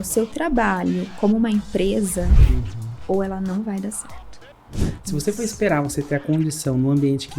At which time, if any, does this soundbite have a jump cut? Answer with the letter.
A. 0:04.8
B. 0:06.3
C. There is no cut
A